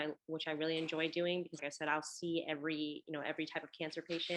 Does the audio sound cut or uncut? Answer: cut